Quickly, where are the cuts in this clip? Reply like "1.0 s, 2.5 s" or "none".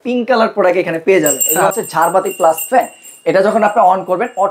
1.4 s